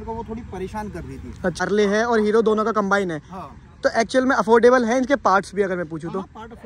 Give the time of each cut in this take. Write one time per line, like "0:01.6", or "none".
0:01.6